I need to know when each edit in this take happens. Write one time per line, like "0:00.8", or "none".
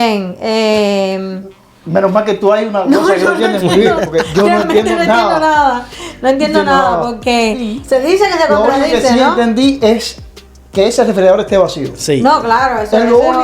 0:07.7